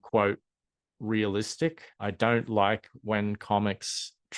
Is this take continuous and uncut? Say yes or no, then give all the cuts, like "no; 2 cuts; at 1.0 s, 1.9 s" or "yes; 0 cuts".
no; 1 cut; at 1.9 s